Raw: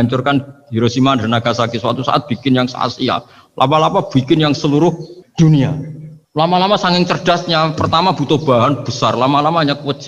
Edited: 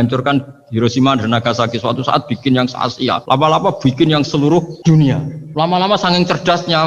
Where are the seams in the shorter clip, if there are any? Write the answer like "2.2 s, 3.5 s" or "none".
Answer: 3.2 s, 5.0 s